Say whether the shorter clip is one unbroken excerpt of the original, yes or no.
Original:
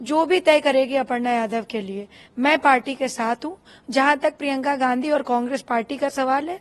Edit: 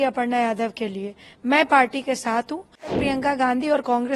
no